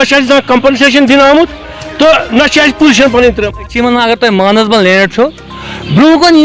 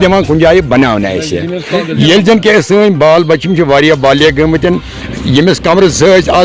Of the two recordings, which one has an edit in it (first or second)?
first